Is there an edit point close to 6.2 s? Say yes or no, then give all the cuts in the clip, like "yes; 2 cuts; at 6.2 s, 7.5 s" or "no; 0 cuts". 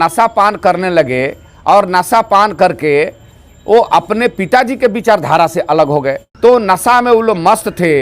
yes; 1 cut; at 6.2 s